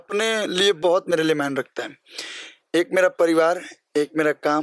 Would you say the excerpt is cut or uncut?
uncut